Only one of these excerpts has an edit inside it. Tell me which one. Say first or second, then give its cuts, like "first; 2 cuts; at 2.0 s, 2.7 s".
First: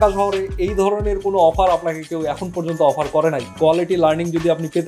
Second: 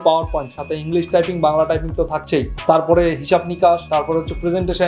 first; 1 cut; at 3.5 s